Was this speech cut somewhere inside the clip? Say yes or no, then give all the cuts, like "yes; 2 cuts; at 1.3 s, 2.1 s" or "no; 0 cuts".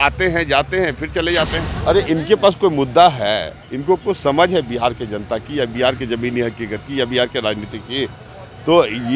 yes; 1 cut; at 1.7 s